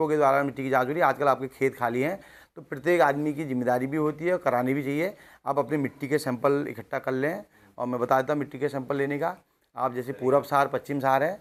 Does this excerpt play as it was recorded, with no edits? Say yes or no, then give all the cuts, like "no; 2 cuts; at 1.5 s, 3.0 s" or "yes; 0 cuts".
yes; 0 cuts